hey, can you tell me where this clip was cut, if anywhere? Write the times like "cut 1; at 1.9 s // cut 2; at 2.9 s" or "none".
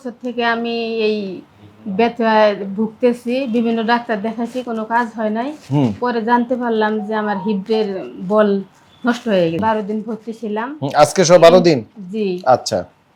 cut 1; at 9.6 s